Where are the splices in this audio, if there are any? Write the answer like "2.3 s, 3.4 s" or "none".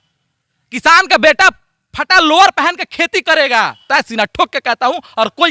3.9 s

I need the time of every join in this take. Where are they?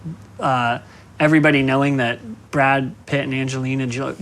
2.3 s, 3.0 s

